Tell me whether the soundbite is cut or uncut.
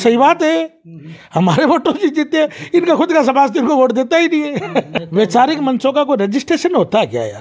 cut